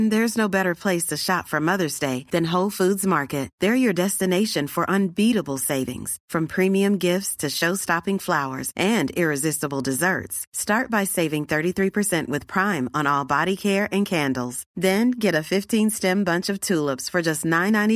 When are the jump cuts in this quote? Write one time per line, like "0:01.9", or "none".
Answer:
none

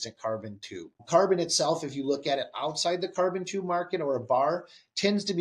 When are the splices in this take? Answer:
0:01.0

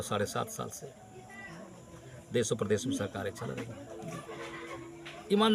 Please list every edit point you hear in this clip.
none

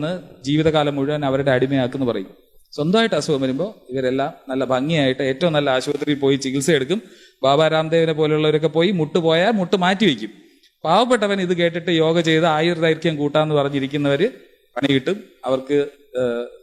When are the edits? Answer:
none

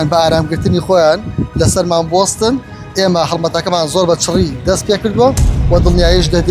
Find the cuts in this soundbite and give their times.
none

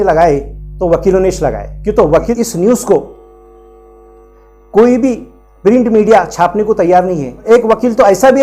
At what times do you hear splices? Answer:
0:02.2
0:07.5

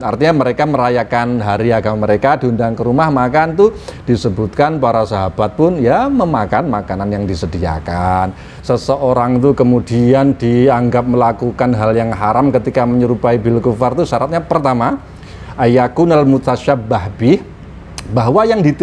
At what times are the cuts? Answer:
0:08.5

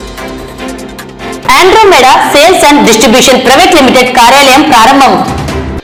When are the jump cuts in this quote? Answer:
none

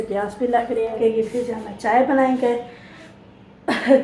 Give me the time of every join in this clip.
0:01.0

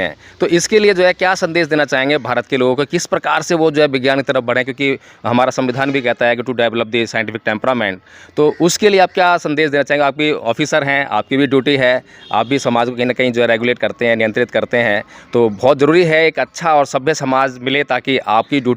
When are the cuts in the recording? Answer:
none

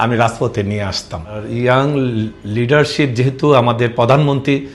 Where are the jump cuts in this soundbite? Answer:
0:01.4

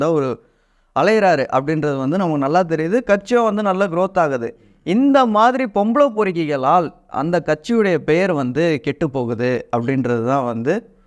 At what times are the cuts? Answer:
none

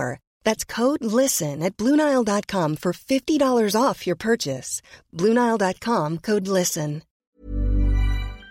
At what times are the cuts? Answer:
0:07.1

